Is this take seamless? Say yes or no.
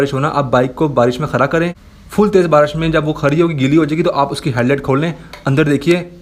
yes